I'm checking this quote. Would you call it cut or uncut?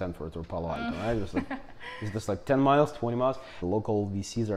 cut